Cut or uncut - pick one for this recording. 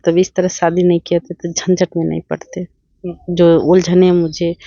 uncut